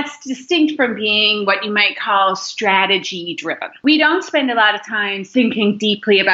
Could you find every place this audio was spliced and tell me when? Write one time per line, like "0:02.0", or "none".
0:03.8
0:05.3